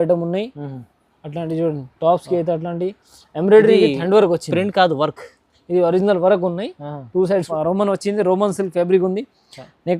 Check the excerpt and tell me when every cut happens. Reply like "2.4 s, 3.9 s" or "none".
7.5 s